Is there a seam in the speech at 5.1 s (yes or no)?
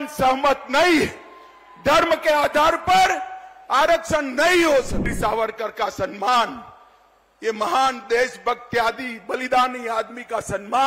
yes